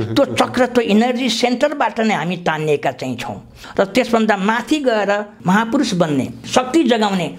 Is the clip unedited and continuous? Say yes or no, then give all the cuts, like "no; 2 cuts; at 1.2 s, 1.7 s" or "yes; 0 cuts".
no; 2 cuts; at 3.6 s, 5.3 s